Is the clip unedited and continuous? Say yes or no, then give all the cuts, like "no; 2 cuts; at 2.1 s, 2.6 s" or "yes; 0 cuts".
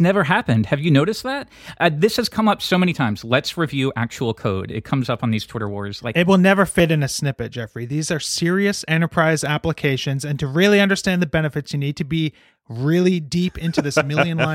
yes; 0 cuts